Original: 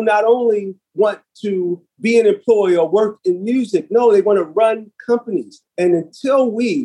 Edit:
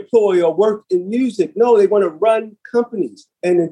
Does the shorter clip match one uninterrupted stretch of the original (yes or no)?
yes